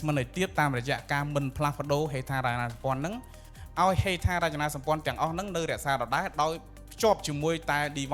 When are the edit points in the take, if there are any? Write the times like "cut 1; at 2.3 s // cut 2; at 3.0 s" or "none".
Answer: none